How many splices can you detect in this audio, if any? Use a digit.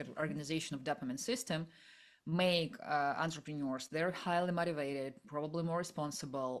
0